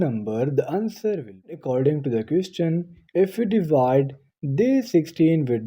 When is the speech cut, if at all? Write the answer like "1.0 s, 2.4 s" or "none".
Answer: 1.6 s